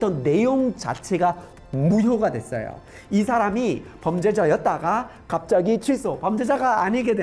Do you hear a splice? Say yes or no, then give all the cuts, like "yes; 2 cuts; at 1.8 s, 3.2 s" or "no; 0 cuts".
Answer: no; 0 cuts